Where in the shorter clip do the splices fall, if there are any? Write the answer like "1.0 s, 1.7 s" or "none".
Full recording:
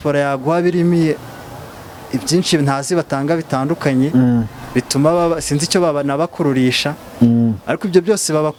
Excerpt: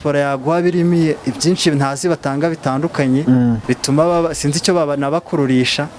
1.2 s, 3.6 s